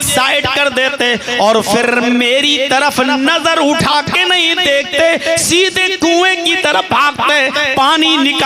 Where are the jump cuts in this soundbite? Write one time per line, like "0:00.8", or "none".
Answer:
none